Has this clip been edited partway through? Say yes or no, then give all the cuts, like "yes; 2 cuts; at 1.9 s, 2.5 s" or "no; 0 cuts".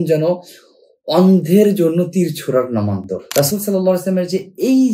yes; 1 cut; at 3.2 s